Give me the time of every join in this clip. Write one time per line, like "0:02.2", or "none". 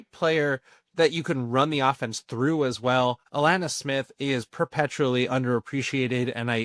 0:03.2